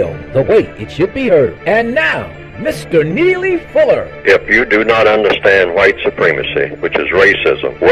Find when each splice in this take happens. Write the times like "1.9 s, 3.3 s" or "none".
none